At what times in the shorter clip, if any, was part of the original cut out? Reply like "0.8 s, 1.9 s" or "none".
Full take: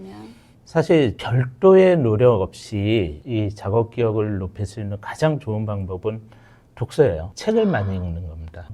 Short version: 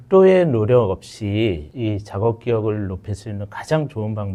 none

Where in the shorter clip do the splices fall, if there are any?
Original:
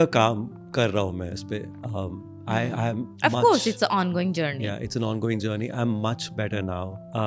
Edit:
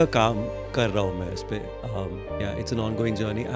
2.4 s

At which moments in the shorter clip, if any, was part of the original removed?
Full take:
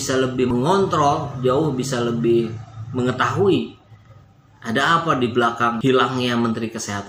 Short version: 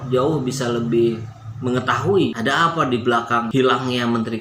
2.4 s

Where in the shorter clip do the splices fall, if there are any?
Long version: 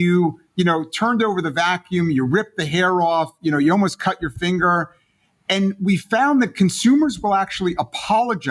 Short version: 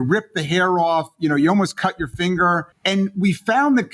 2.7 s

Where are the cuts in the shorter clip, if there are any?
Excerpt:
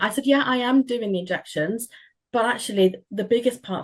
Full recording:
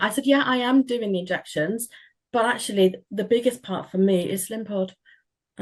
none

